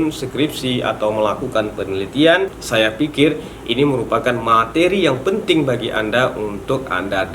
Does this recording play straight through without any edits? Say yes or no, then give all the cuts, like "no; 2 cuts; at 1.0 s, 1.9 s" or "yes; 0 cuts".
no; 1 cut; at 2.6 s